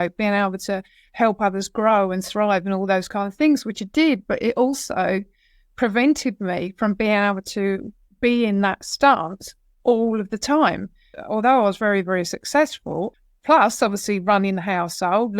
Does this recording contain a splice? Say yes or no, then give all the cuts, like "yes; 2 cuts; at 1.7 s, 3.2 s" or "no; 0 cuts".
yes; 2 cuts; at 11.2 s, 13.1 s